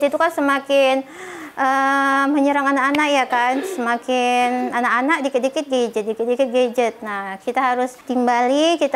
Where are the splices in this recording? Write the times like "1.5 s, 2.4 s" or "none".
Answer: 8.0 s